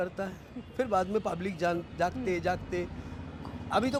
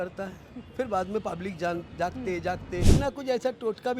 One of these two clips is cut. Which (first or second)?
second